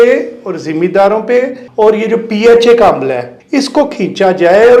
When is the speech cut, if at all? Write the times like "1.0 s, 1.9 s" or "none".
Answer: 1.6 s, 3.3 s